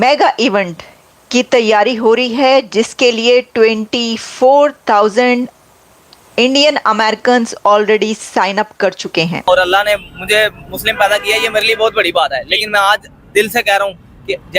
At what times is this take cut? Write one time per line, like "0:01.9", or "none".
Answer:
0:09.4